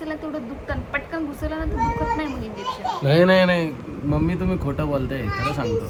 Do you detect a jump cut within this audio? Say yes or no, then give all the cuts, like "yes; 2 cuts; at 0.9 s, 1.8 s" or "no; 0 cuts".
no; 0 cuts